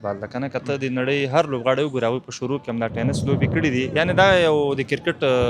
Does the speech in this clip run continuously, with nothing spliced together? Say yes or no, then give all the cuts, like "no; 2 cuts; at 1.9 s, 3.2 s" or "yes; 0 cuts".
yes; 0 cuts